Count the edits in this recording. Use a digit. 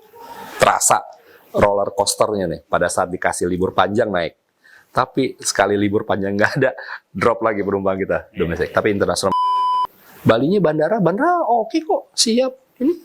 1